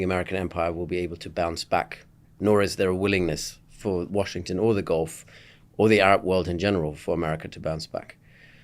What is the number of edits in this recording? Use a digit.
0